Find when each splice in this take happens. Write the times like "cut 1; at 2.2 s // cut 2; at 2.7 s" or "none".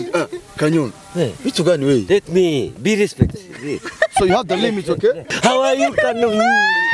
cut 1; at 5.3 s